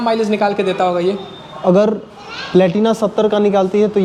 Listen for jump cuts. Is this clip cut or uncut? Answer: uncut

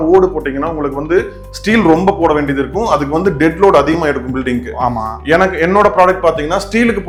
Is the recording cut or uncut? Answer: uncut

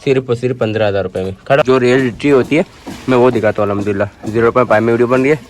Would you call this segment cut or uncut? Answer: cut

